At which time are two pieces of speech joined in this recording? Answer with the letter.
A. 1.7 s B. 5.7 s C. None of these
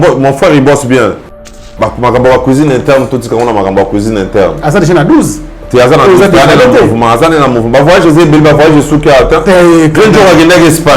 A